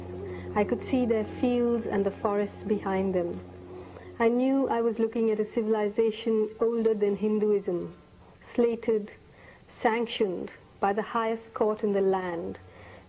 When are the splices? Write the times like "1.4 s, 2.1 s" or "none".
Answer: none